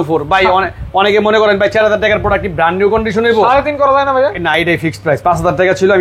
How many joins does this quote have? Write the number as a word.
zero